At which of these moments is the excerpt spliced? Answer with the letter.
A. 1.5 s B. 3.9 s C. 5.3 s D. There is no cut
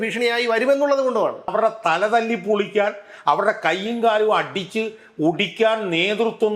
A